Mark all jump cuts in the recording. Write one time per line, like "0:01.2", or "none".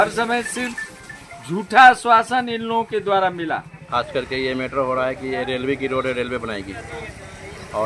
0:03.8